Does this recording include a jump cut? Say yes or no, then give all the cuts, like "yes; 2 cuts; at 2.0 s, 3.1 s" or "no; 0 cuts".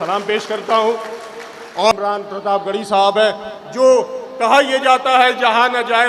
yes; 1 cut; at 1.9 s